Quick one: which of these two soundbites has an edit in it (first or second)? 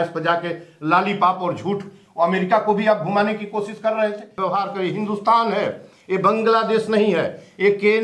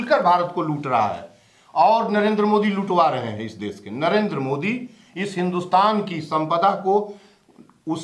first